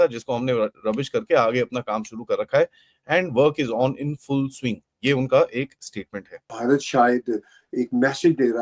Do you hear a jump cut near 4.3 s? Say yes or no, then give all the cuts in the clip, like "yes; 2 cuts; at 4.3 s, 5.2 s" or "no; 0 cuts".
no; 1 cut; at 6.5 s